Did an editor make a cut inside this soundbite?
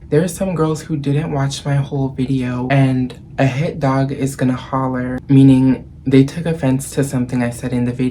yes; 2 cuts; at 2.7 s, 5.2 s

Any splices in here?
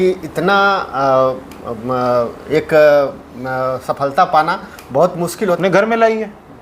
yes; 1 cut; at 5.3 s

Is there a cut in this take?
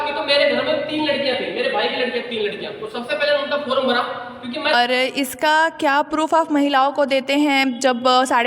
yes; 1 cut; at 4.7 s

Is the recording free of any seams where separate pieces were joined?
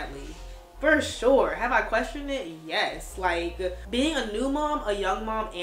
no; 1 cut; at 3.8 s

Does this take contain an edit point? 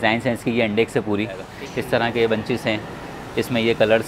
yes; 1 cut; at 1.5 s

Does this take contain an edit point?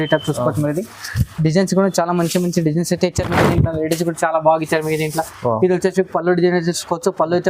no; 0 cuts

